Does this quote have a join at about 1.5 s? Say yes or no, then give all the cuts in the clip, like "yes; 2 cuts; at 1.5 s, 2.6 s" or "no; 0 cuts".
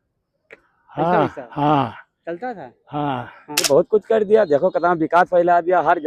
no; 1 cut; at 3.6 s